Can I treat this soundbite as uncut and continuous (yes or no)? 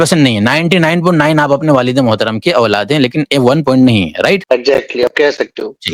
no